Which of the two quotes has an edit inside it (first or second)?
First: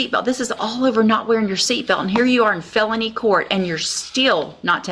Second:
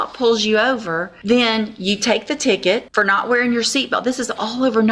second